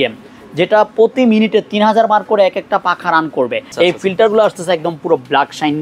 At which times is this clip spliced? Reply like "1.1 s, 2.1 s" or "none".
3.7 s